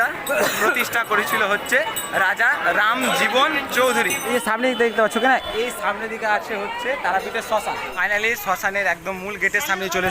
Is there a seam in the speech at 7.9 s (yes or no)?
yes